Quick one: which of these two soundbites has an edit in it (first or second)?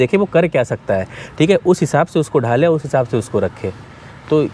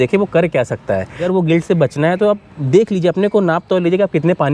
second